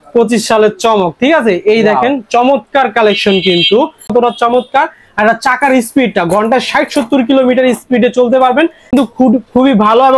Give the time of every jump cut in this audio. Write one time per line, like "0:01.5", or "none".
0:04.1
0:08.9